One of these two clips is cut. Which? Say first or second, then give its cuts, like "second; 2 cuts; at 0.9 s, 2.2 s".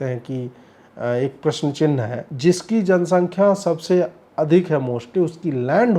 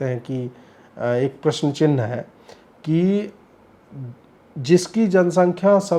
first; 1 cut; at 2.2 s